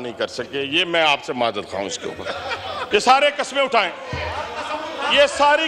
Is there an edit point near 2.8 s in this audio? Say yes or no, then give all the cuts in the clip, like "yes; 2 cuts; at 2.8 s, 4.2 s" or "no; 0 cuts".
yes; 1 cut; at 2.8 s